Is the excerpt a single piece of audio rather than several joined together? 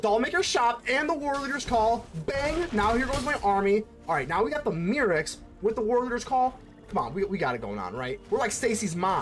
no; 1 cut; at 8.2 s

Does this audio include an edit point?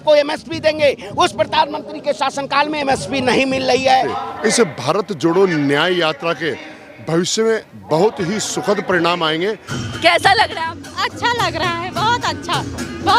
yes; 2 cuts; at 4.2 s, 9.7 s

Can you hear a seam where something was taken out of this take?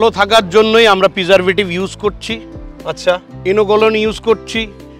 no; 0 cuts

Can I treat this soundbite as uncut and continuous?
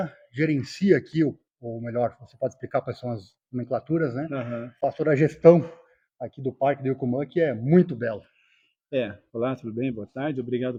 yes; 0 cuts

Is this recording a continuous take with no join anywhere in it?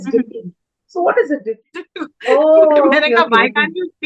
no; 1 cut; at 1.6 s

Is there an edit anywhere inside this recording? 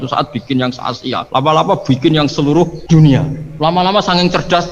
yes; 3 cuts; at 1.2 s, 2.8 s, 3.4 s

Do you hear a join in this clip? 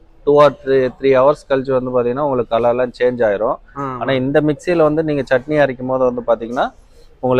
no; 0 cuts

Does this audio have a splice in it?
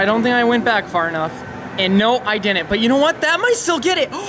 no; 0 cuts

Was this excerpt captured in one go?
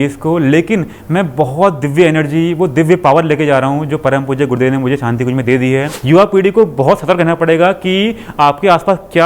no; 1 cut; at 5.9 s

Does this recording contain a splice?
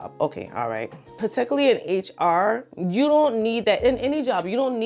yes; 1 cut; at 1.0 s

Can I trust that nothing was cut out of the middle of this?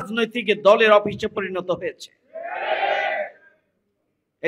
yes; 0 cuts

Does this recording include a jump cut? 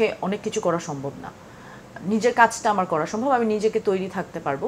no; 0 cuts

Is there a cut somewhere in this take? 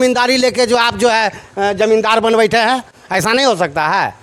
no; 0 cuts

